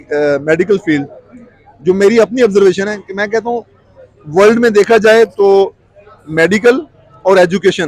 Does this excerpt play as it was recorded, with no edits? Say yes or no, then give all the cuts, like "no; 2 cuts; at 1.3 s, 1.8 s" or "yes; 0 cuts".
yes; 0 cuts